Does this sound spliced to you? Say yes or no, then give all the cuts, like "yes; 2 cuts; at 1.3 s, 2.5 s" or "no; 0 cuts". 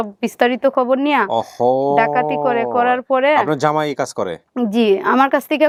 no; 0 cuts